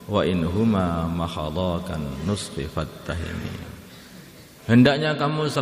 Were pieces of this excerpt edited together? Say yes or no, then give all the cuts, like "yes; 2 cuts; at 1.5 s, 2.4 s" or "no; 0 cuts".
yes; 1 cut; at 4.5 s